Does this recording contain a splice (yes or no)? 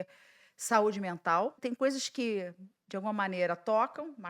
yes